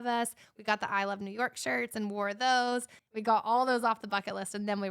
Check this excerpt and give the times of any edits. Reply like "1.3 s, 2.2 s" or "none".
2.9 s